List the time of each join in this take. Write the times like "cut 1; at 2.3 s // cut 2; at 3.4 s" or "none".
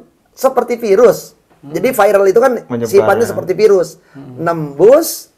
none